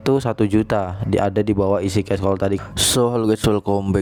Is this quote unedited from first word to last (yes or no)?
yes